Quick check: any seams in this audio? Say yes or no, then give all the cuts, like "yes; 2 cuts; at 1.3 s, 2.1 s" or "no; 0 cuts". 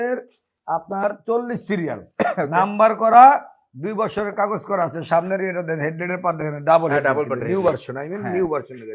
no; 0 cuts